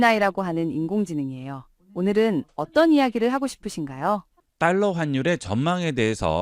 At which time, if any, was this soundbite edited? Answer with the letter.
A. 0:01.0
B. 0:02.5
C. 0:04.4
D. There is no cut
C